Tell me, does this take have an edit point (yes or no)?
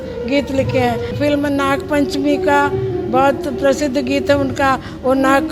yes